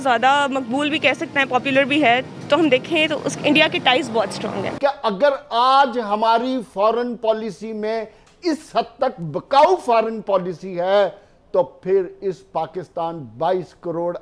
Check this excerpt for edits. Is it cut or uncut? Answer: cut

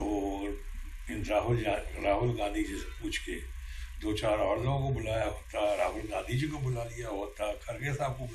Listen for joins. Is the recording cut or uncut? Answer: uncut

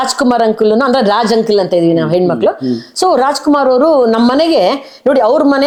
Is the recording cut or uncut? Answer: uncut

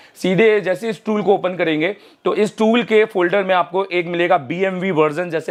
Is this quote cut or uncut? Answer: uncut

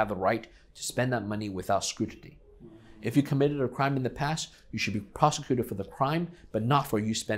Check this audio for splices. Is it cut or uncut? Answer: uncut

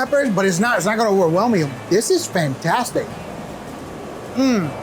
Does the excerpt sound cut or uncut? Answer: uncut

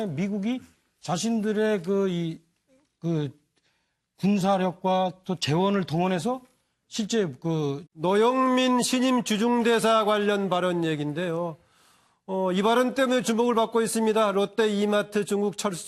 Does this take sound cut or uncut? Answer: uncut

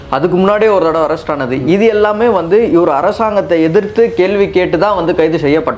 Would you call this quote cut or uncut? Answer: uncut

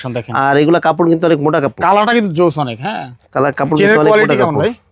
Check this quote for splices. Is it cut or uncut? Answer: uncut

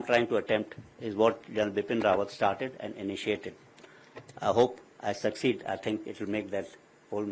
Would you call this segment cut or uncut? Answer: uncut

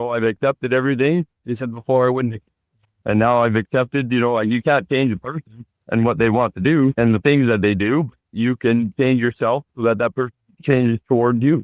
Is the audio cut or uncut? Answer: uncut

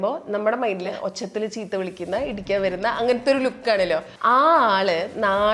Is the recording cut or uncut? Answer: cut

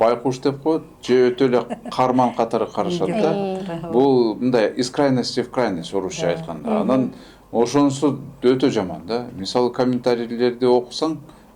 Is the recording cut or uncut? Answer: uncut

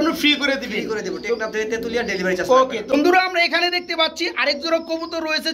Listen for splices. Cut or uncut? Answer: uncut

